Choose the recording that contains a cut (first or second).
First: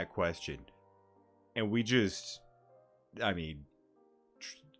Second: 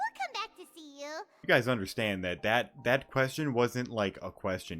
second